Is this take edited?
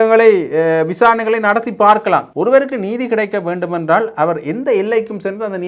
yes; 1 cut; at 2.3 s

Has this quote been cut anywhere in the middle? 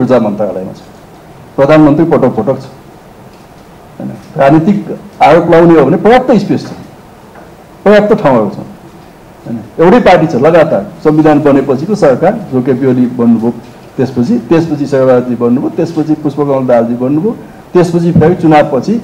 no; 0 cuts

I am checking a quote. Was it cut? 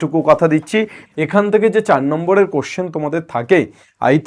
yes; 1 cut; at 1.0 s

